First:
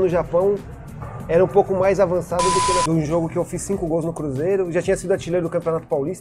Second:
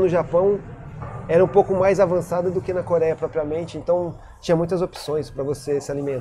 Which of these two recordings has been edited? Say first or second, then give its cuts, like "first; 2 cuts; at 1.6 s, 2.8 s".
first; 1 cut; at 2.8 s